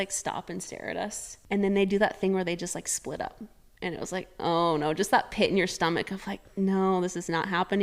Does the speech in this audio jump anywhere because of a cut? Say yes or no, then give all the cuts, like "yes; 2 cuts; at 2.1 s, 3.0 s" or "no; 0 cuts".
yes; 1 cut; at 1.3 s